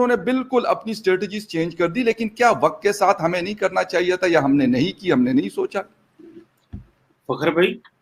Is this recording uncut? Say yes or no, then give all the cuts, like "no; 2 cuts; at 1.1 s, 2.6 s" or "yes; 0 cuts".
yes; 0 cuts